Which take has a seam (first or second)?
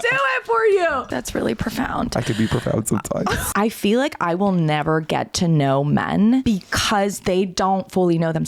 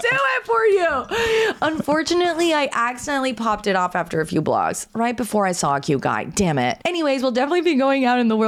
first